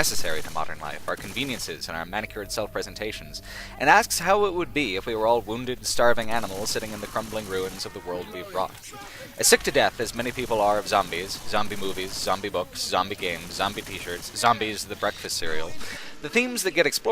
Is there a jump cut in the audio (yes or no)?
yes